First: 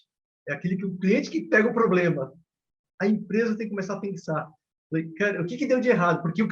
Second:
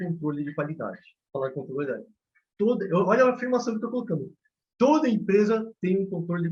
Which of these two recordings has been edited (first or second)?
first